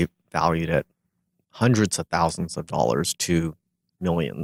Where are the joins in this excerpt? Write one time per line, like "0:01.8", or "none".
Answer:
none